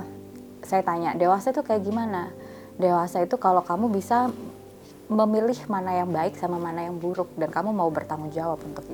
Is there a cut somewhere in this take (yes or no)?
no